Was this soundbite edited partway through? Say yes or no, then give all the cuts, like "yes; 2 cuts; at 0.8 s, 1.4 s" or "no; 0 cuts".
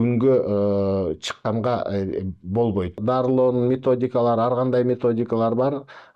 yes; 1 cut; at 3.0 s